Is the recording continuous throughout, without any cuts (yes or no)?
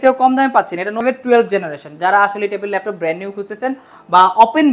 no